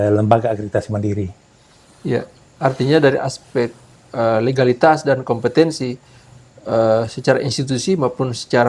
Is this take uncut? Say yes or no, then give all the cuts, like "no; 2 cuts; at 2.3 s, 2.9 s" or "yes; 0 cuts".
yes; 0 cuts